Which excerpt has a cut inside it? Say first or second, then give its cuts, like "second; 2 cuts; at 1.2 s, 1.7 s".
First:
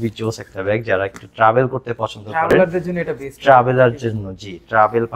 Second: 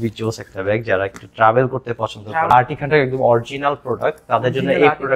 second; 1 cut; at 2.5 s